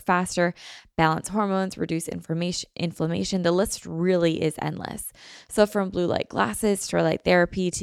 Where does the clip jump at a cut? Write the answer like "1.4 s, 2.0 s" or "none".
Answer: none